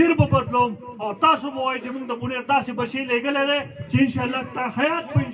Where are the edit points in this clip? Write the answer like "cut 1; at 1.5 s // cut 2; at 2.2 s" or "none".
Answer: none